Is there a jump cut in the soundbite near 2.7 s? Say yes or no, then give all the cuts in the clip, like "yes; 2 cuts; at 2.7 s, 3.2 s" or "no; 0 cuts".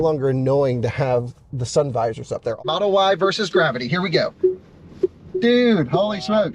yes; 1 cut; at 2.7 s